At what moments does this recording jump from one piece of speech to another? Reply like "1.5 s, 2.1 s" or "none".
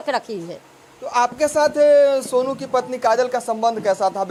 none